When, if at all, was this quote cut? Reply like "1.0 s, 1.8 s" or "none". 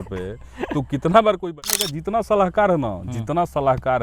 1.7 s